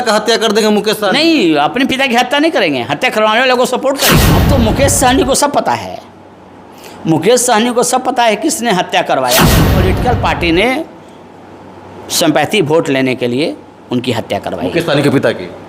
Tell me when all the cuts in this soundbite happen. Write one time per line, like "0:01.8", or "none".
0:04.3
0:09.8